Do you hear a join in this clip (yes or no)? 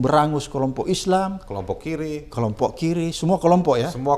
no